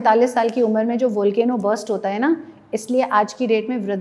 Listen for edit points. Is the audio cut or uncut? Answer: uncut